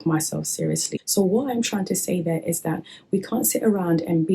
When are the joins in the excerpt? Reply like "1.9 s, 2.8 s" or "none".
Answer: 0.9 s